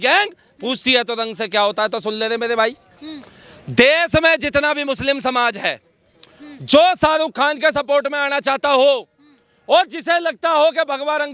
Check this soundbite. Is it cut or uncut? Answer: uncut